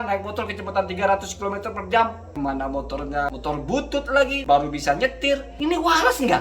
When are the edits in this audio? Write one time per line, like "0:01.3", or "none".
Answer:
0:02.2
0:03.3
0:04.4
0:05.5